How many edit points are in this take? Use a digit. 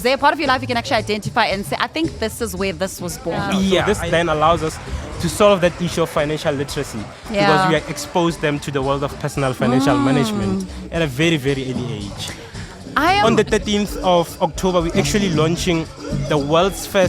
2